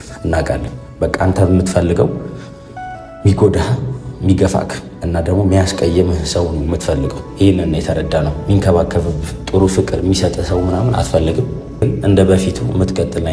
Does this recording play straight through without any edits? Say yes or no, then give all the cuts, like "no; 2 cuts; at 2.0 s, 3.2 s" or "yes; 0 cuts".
no; 1 cut; at 11.8 s